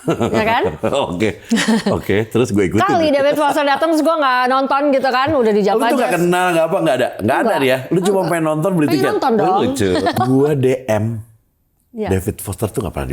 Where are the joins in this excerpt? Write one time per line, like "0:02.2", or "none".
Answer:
0:10.1